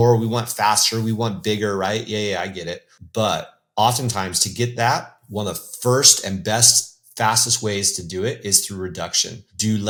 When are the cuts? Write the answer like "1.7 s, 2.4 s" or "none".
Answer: none